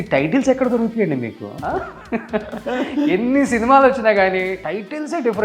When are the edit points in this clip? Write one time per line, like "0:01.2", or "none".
0:01.5
0:04.6